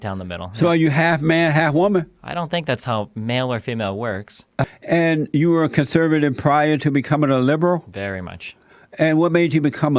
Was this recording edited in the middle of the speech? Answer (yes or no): yes